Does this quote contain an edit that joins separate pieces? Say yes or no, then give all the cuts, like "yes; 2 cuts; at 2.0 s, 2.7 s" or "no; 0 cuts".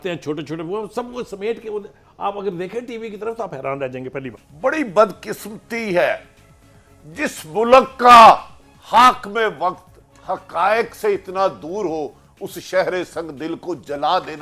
yes; 1 cut; at 4.5 s